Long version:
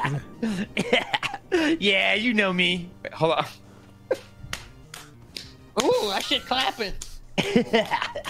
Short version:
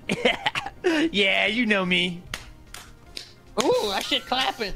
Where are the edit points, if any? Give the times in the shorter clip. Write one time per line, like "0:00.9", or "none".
0:02.3